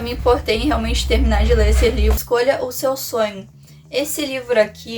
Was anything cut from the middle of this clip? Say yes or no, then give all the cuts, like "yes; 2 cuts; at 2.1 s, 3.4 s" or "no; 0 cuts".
yes; 1 cut; at 2.2 s